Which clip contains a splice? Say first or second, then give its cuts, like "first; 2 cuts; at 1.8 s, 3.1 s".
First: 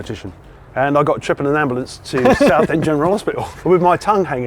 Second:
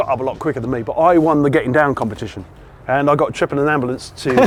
first; 1 cut; at 3.5 s